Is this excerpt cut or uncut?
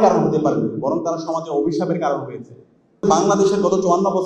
cut